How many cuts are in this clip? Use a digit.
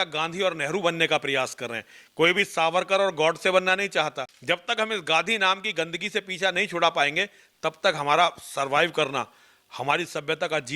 1